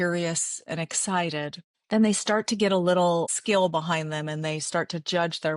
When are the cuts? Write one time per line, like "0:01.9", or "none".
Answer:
0:01.7
0:03.3